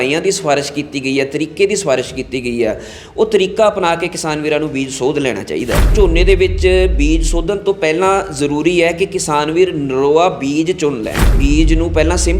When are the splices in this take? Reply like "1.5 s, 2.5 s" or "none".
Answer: 5.9 s, 11.4 s